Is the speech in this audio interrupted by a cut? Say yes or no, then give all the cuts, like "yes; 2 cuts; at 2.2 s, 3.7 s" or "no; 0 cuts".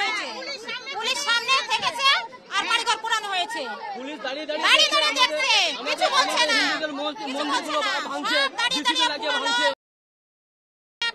no; 0 cuts